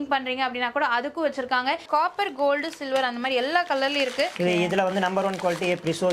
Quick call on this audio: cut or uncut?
cut